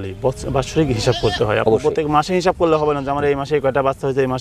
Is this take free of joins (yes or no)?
yes